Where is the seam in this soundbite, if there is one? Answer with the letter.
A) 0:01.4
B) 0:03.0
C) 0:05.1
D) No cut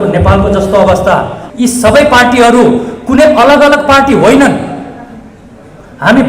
A